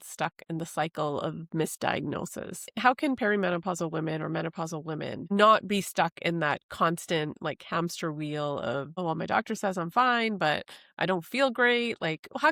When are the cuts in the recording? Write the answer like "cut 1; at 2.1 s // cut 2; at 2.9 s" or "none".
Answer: none